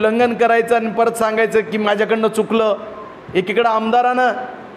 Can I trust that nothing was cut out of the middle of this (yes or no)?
yes